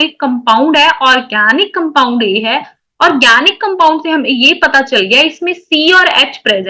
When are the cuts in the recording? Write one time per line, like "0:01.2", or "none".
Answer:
none